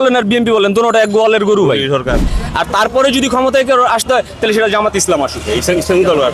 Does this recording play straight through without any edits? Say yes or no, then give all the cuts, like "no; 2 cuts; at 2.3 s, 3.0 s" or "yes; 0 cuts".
no; 1 cut; at 2.4 s